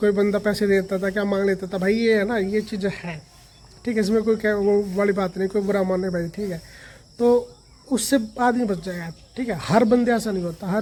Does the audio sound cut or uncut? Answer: uncut